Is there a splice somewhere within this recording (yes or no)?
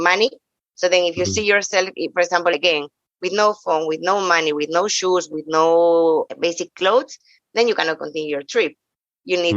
yes